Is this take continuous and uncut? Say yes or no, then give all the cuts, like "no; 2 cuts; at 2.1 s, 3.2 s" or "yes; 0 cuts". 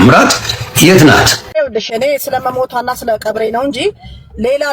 no; 1 cut; at 1.4 s